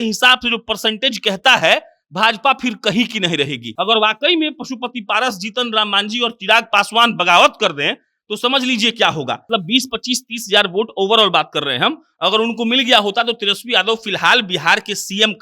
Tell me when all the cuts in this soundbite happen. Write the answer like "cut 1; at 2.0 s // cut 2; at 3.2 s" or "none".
cut 1; at 3.6 s // cut 2; at 9.5 s